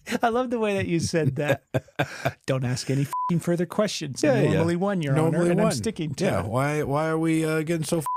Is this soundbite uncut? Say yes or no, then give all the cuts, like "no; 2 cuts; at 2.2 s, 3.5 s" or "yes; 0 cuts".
yes; 0 cuts